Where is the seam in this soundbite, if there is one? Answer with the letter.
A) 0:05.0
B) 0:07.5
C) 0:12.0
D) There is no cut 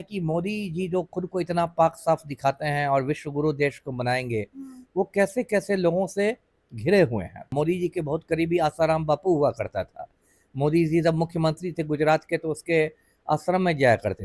B